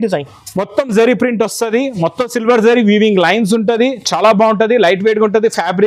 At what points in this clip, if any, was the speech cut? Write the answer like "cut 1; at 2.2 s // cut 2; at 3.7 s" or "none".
none